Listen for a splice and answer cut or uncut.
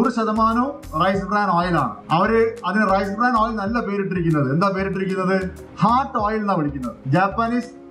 cut